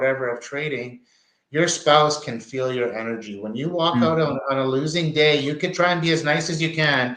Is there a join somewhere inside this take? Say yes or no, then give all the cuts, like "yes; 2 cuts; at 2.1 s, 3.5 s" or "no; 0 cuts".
no; 0 cuts